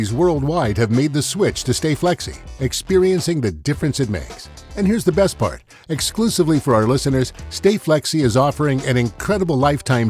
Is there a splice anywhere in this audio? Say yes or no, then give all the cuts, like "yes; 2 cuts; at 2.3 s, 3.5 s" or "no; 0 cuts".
no; 0 cuts